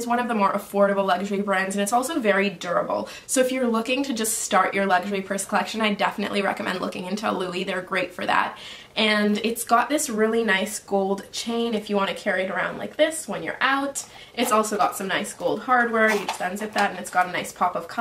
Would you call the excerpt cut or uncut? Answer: uncut